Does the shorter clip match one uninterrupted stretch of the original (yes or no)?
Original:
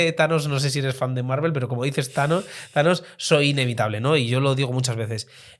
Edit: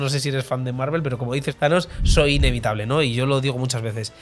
no